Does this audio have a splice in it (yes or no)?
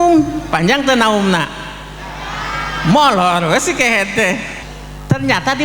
yes